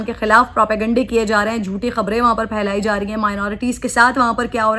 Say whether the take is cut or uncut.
uncut